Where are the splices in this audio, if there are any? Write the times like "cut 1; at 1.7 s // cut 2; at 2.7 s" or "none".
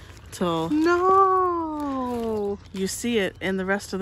cut 1; at 2.7 s